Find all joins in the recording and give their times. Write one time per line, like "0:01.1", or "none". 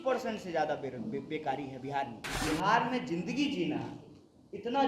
0:02.2